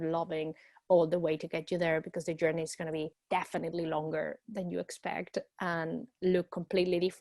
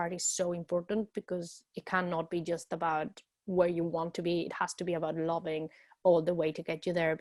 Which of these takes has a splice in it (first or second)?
first